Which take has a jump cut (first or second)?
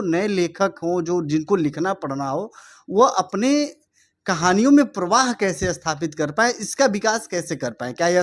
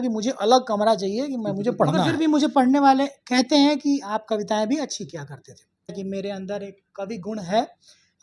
second